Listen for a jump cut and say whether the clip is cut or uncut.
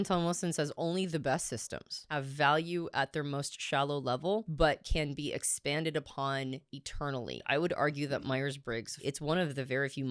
cut